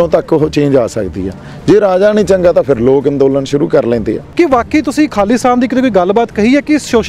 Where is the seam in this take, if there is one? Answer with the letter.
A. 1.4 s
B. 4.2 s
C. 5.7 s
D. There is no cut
B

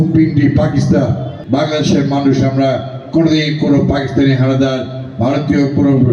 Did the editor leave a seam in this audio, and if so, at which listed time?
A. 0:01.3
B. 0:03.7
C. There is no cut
A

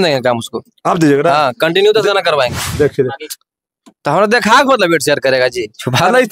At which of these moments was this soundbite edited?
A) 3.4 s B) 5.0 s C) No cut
A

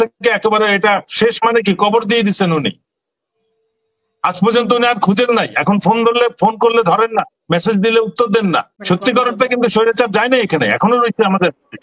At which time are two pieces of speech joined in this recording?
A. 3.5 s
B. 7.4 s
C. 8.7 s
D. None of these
C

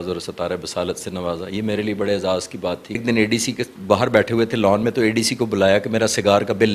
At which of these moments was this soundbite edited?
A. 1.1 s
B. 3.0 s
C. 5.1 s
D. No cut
B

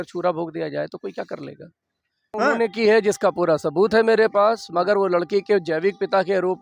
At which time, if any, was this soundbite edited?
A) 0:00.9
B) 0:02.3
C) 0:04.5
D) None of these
B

